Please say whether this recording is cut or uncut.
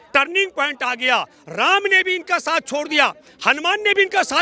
uncut